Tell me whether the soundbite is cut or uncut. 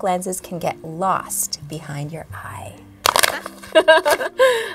uncut